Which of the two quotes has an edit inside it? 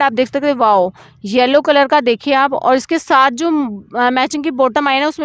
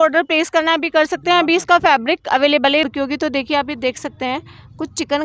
second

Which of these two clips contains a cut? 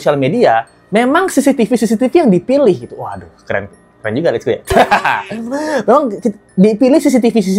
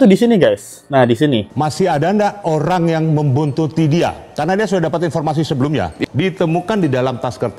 second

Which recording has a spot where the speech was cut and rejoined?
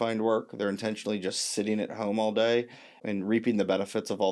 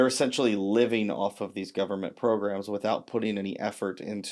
first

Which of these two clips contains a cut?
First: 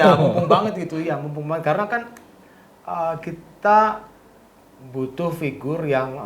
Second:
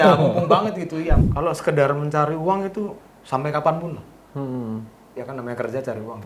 second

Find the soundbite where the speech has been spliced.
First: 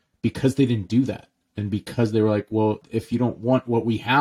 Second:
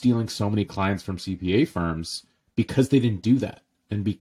first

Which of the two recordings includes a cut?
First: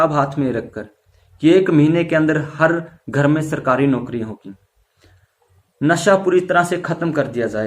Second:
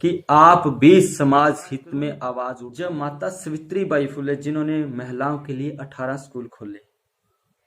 second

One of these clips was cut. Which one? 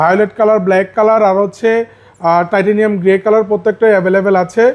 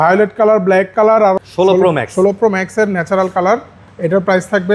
second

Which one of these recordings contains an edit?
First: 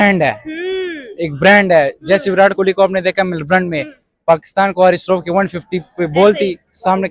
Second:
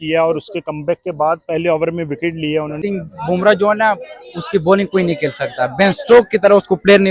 second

